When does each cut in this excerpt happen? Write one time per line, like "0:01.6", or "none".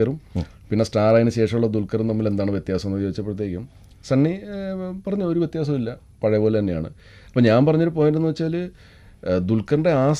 none